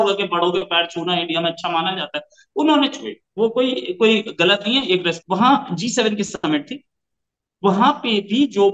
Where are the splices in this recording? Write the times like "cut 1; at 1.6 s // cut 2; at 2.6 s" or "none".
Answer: cut 1; at 5.1 s